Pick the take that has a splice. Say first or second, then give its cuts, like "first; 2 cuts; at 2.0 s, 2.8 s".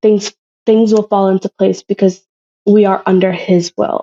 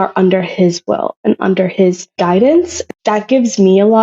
second; 2 cuts; at 2.1 s, 2.8 s